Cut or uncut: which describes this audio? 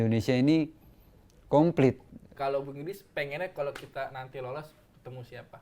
cut